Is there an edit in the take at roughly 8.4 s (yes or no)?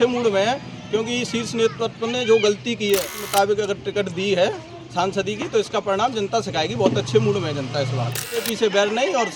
yes